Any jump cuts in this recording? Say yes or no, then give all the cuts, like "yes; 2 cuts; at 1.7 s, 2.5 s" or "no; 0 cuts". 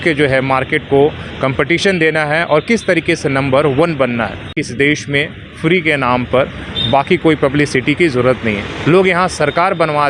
yes; 1 cut; at 4.6 s